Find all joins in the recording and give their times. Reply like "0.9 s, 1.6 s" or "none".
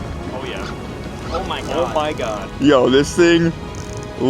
2.4 s

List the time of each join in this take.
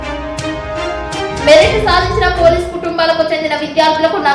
1.3 s

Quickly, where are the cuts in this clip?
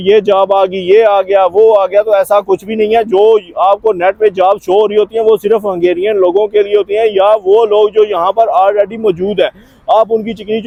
none

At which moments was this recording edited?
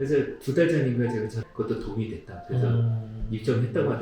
1.4 s

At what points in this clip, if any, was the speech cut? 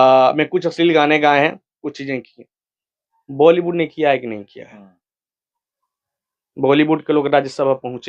none

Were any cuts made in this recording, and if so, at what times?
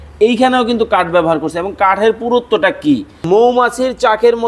3.2 s

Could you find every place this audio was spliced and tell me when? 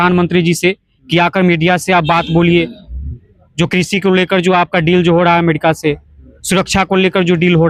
none

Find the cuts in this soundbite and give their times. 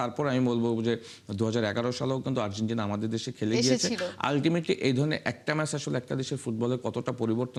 none

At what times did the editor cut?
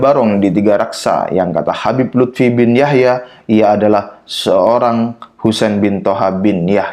none

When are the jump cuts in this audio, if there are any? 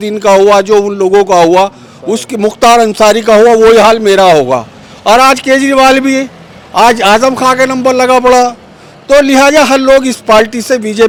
none

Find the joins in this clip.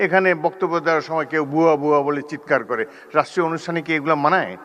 none

